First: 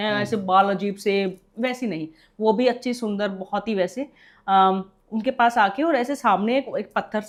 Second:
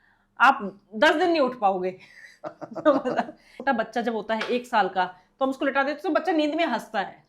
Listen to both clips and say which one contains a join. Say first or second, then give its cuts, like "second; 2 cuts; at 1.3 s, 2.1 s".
second; 1 cut; at 3.5 s